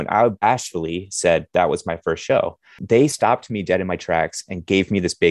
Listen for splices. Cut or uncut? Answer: cut